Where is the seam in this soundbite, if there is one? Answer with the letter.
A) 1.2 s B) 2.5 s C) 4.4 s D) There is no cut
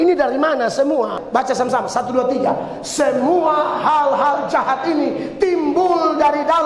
A